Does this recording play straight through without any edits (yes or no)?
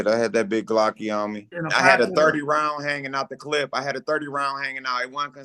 no